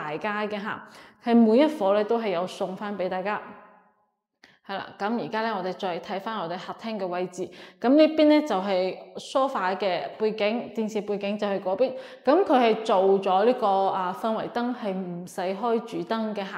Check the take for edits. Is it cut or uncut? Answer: uncut